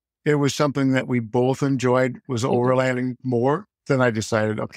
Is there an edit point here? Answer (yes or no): no